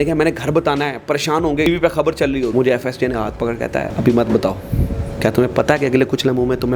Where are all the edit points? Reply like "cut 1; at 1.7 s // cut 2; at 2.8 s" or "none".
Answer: cut 1; at 1.7 s // cut 2; at 2.5 s // cut 3; at 3.9 s